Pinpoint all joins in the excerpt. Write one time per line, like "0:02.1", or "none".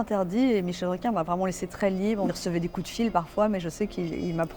0:02.3